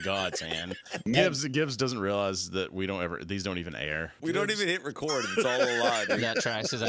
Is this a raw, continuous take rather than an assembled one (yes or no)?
no